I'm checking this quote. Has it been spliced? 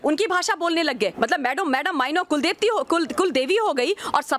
yes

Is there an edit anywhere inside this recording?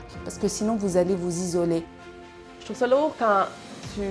yes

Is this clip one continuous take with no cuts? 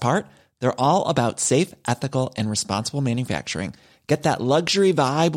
yes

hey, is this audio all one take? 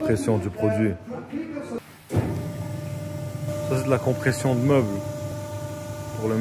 no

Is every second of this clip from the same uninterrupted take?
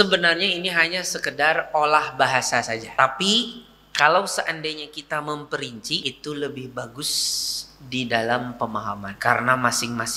no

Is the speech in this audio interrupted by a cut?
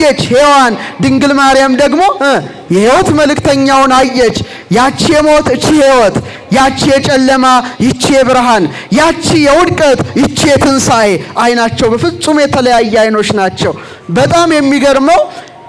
no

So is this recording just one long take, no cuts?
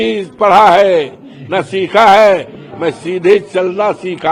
yes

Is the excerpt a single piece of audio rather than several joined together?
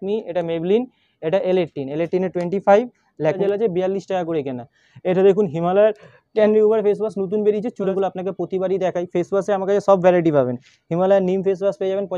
no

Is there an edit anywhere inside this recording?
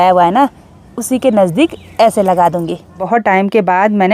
yes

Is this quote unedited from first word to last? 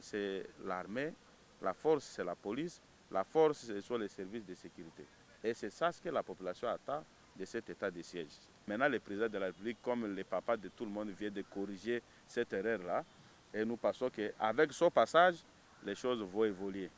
no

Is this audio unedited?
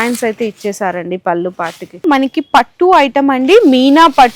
no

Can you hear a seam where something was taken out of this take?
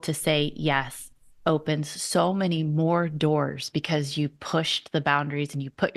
no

